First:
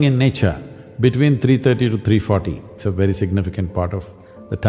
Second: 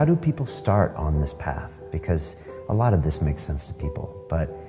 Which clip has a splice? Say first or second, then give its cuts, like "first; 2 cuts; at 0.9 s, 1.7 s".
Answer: first; 1 cut; at 2.7 s